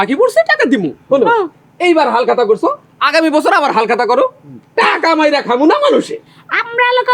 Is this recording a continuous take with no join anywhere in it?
no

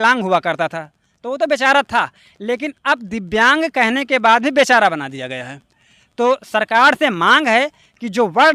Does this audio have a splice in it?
no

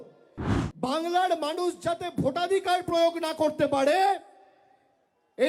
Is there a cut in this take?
no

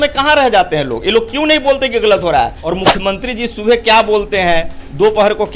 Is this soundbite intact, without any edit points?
no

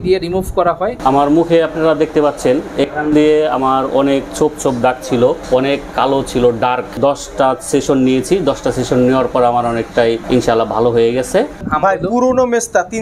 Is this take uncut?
no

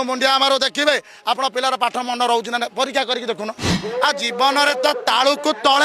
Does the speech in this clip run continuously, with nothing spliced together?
no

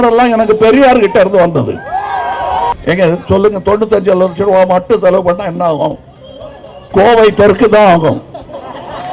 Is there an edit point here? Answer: yes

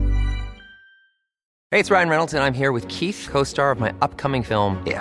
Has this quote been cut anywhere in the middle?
yes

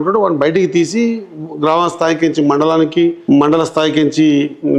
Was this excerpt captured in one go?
no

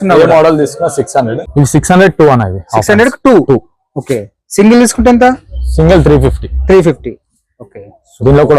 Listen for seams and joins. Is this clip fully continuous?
no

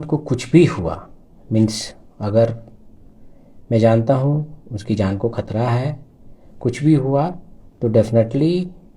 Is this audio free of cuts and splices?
yes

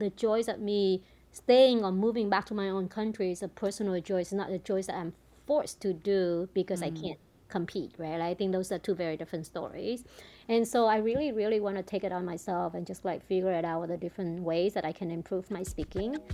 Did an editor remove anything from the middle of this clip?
no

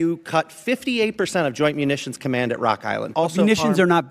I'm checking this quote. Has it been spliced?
yes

